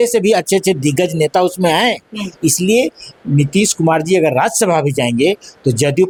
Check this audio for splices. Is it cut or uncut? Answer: uncut